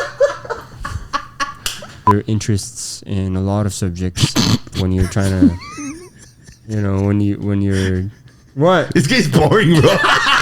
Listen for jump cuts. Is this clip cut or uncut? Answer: cut